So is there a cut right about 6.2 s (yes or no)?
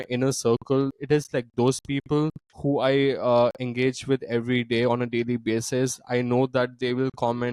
no